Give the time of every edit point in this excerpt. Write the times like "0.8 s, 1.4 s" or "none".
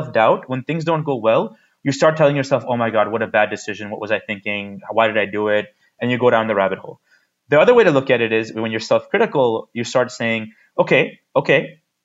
none